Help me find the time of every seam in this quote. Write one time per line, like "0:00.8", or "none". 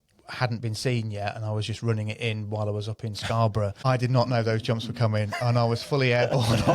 0:03.8

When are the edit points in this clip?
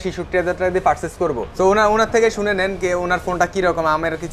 0:01.4

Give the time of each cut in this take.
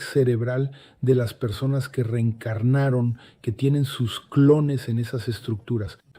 none

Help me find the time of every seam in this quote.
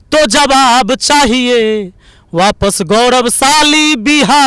none

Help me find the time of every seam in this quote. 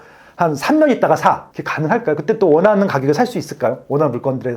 0:01.5

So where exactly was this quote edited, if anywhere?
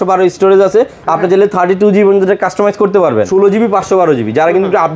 0:03.3

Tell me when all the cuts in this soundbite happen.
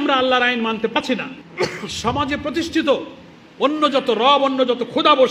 0:00.9

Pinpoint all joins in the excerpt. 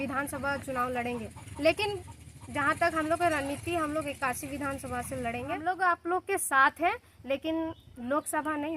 0:05.6

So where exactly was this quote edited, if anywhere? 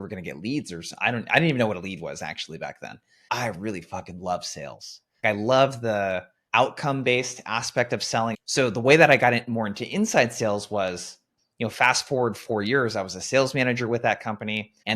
0:03.1
0:08.4

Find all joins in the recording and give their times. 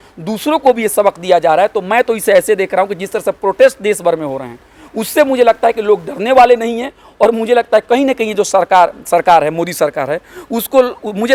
none

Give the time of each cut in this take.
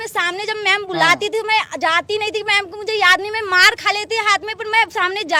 none

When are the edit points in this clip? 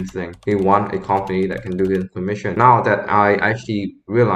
0:02.5

